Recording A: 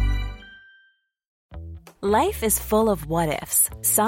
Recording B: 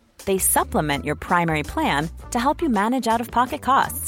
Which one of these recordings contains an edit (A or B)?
A